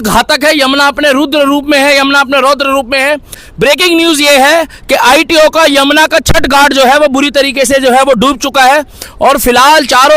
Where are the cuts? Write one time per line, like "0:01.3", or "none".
0:03.4